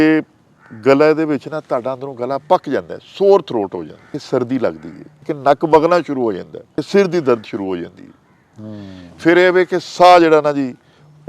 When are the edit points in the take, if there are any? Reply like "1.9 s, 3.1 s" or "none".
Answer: 4.1 s, 5.3 s, 6.8 s